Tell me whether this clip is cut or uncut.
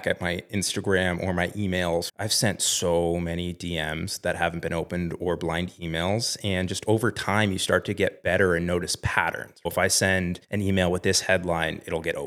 cut